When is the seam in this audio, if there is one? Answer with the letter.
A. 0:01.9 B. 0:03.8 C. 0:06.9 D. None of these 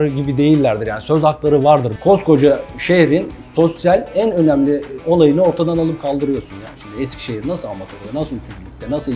A